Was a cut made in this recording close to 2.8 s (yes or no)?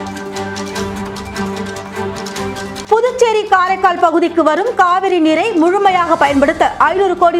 yes